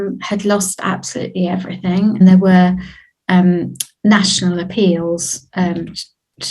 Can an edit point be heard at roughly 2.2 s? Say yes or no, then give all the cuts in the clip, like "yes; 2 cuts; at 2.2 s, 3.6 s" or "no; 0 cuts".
yes; 1 cut; at 2.2 s